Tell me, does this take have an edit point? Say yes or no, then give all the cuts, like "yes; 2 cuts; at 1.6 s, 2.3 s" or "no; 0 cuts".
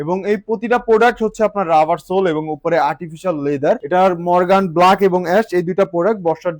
yes; 1 cut; at 3.8 s